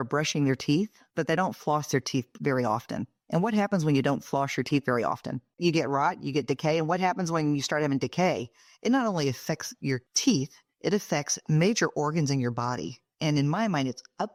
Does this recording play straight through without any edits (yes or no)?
yes